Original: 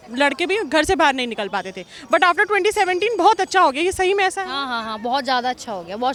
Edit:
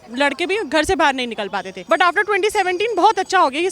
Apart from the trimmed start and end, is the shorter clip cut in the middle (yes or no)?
yes